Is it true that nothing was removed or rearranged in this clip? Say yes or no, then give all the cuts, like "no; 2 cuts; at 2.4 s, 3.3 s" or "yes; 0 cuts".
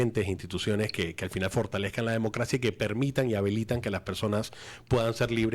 yes; 0 cuts